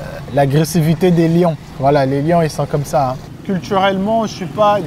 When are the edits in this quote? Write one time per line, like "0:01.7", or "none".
0:03.3